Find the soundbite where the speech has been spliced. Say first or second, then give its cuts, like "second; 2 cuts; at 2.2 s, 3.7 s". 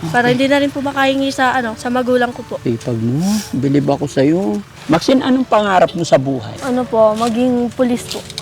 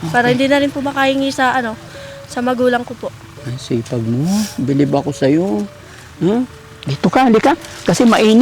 first; 4 cuts; at 1.8 s, 2.5 s, 4.7 s, 6.5 s